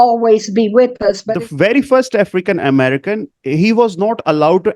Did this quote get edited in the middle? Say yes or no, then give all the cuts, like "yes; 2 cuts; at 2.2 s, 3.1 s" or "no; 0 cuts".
yes; 1 cut; at 1.3 s